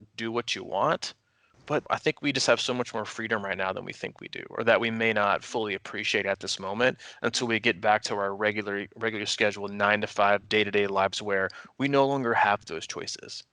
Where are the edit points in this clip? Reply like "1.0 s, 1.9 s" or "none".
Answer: 1.9 s

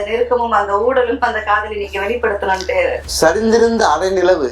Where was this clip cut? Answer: 3.1 s

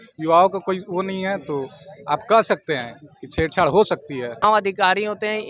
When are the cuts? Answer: 4.4 s

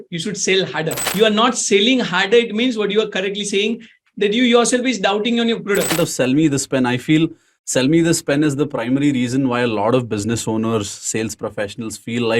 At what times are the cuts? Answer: 1.1 s, 5.9 s

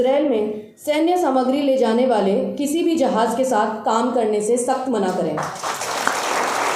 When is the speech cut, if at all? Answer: none

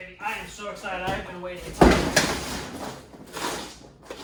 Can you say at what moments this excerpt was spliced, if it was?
none

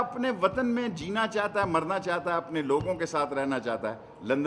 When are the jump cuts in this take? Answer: none

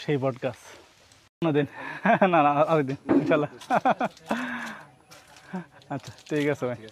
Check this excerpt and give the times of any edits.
1.4 s

